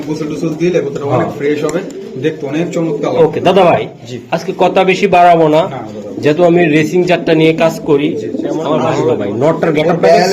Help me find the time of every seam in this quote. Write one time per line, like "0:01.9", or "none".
0:08.9